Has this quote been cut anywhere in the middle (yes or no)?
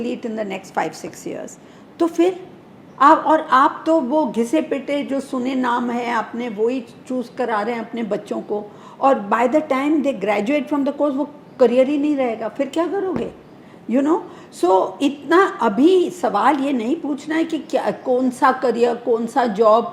no